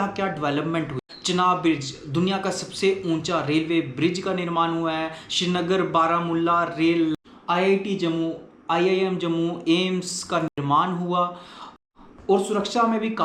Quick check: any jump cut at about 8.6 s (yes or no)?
no